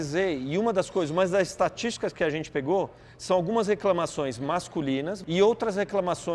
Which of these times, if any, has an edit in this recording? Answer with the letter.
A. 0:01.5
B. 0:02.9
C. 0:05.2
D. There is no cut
C